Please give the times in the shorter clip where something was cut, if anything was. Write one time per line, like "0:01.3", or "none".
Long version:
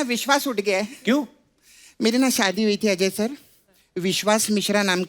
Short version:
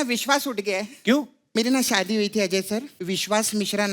0:01.4
0:02.9